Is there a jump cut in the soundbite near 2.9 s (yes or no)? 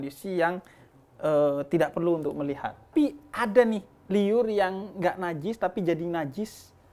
yes